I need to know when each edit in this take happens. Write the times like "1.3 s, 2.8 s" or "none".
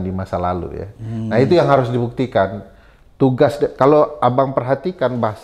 none